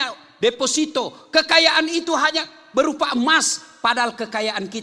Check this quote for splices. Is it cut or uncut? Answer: uncut